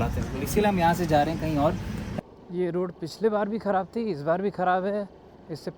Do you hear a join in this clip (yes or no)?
yes